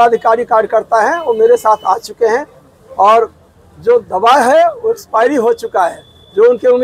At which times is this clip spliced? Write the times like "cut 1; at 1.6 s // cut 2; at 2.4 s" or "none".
none